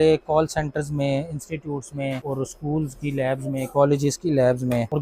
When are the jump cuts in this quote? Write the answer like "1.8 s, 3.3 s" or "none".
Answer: none